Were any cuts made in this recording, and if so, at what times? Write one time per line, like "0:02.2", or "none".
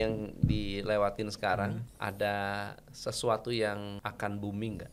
0:01.9
0:04.0